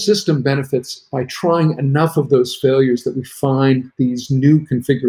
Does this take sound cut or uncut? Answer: uncut